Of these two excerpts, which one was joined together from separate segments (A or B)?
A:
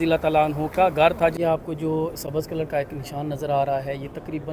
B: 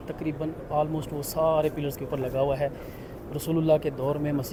A